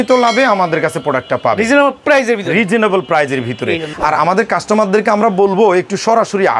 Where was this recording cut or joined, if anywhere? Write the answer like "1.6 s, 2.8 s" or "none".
3.9 s